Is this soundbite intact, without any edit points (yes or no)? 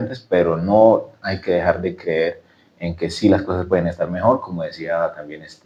yes